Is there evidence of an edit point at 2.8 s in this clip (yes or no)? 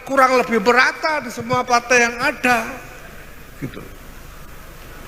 no